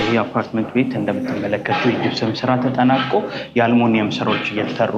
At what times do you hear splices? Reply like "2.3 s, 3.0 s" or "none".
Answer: none